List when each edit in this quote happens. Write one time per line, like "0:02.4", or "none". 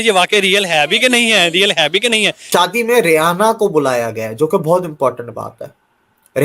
0:02.5